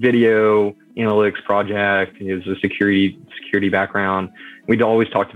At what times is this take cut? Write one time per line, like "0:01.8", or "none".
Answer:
none